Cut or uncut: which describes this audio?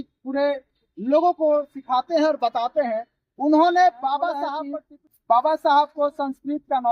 cut